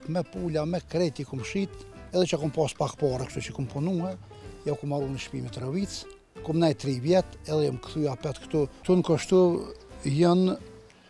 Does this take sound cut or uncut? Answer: cut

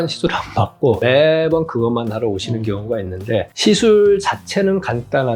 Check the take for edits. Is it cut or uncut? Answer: cut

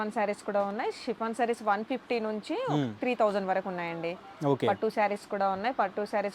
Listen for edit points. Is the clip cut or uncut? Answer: uncut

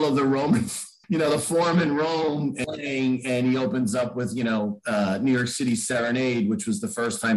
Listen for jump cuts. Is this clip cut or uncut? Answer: cut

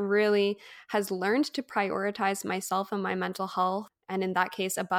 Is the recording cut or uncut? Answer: cut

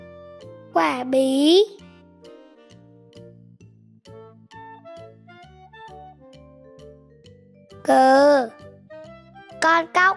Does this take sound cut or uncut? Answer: cut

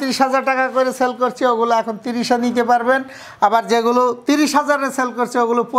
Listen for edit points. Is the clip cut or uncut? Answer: uncut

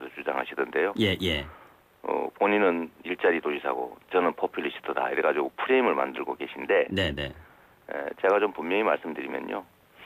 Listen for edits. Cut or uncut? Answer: uncut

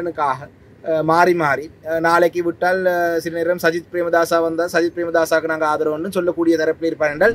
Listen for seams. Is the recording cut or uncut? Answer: uncut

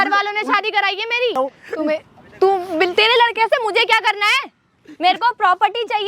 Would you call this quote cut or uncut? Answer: cut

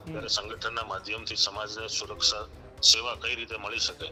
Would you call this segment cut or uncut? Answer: uncut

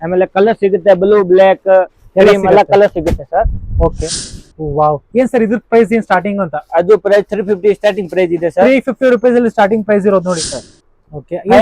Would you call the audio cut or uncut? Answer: cut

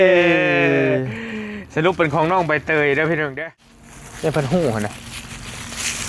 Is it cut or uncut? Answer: cut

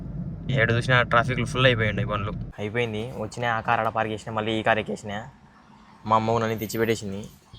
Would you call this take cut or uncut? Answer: cut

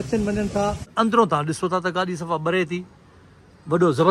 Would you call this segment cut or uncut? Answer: cut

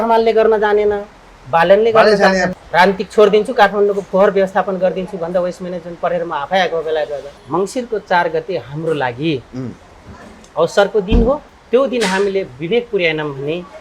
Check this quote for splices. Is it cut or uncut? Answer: cut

